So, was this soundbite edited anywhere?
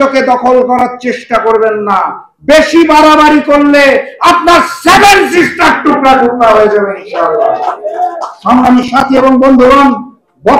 no; 0 cuts

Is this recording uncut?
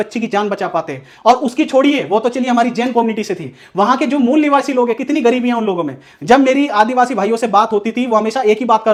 yes; 0 cuts

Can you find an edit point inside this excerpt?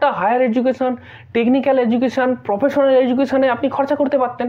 no; 0 cuts

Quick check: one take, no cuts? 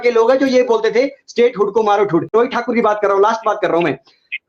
no; 1 cut; at 2.3 s

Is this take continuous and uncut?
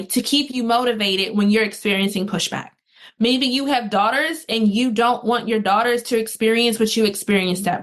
yes; 0 cuts

